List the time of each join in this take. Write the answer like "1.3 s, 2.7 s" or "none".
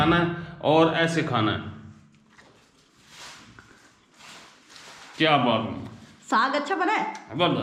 none